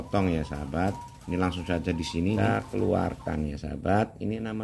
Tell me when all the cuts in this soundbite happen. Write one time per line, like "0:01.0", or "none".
0:02.4